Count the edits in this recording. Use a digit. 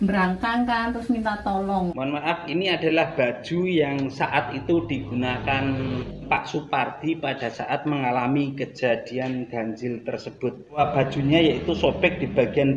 3